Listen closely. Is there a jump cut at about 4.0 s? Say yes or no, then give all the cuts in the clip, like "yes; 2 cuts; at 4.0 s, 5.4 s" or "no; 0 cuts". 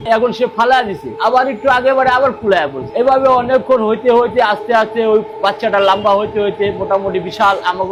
no; 0 cuts